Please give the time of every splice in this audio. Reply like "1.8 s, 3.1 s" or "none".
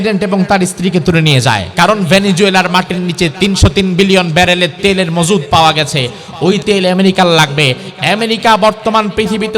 1.7 s, 7.8 s

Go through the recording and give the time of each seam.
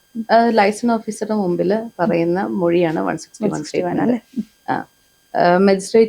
none

